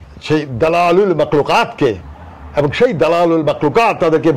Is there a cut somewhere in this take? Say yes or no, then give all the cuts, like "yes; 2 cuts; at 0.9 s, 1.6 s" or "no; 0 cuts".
no; 0 cuts